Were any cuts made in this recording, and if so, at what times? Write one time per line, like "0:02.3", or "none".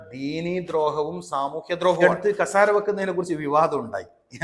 0:02.0